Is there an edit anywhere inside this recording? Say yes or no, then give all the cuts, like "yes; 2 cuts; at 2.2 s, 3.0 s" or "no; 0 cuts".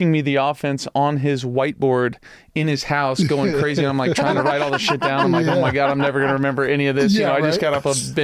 no; 0 cuts